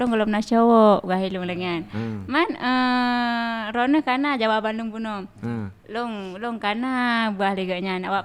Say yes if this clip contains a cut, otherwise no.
no